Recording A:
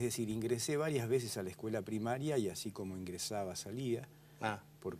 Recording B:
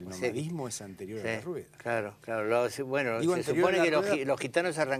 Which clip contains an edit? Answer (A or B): A